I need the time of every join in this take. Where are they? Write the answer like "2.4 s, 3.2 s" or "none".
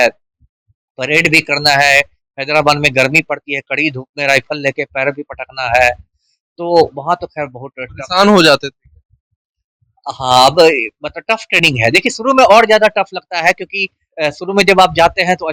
none